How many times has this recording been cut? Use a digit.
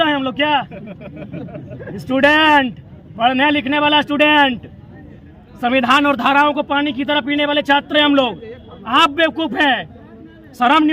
0